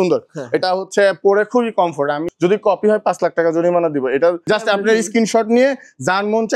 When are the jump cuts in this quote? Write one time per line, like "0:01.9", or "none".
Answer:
0:02.3
0:04.4